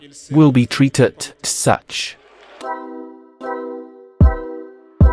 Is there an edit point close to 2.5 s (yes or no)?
yes